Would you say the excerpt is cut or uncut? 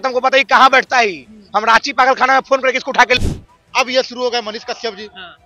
cut